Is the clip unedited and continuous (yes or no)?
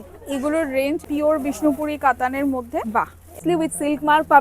no